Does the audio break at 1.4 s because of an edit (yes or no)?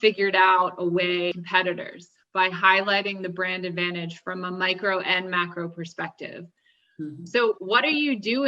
yes